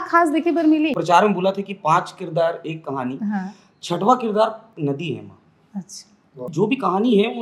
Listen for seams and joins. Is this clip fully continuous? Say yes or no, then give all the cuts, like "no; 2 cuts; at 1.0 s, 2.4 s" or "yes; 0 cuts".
no; 2 cuts; at 1.0 s, 6.5 s